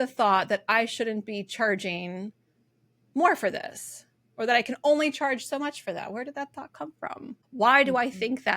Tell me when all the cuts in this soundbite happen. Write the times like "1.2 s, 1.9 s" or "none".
7.4 s